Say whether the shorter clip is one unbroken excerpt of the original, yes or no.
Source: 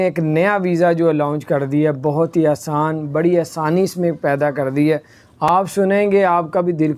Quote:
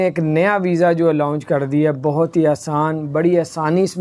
yes